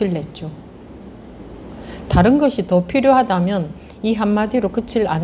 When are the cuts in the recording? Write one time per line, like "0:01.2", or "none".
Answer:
none